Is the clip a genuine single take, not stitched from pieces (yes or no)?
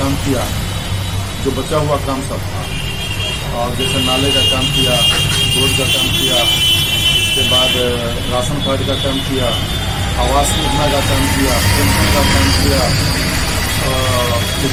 yes